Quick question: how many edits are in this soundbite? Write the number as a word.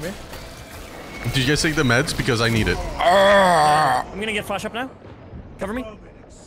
one